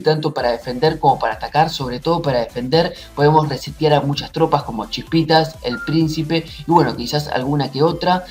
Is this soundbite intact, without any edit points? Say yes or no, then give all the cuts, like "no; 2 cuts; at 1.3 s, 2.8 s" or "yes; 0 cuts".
no; 1 cut; at 7.3 s